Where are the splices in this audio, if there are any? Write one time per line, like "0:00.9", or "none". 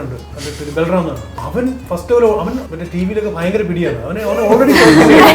0:01.3
0:02.6